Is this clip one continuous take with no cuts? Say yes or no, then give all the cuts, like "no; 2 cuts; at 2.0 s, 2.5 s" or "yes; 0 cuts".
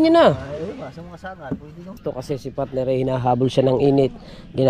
no; 1 cut; at 2.0 s